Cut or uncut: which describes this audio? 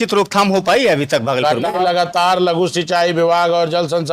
cut